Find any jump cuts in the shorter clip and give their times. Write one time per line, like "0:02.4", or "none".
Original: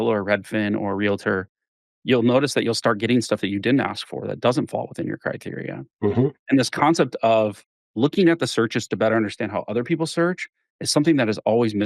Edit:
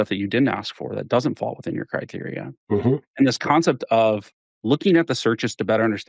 none